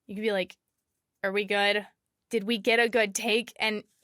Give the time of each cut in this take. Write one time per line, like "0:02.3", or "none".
0:02.1